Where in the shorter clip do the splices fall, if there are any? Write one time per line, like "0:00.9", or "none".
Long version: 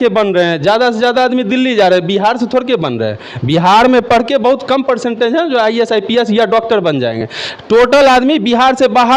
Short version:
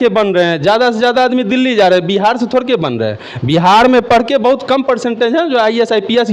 none